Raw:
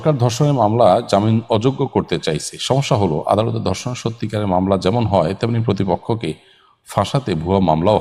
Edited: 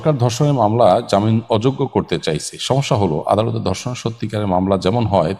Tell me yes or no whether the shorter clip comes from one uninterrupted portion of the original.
yes